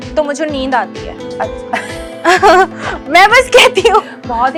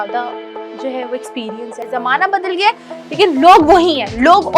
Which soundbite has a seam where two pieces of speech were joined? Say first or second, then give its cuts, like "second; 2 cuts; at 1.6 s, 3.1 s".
second; 1 cut; at 1.9 s